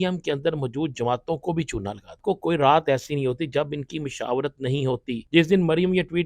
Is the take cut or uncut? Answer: cut